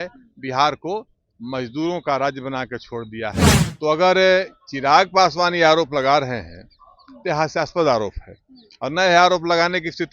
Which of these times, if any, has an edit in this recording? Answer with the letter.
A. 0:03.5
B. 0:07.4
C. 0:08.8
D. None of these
A